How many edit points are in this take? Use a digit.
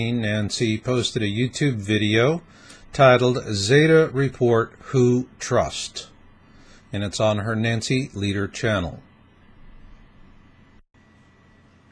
0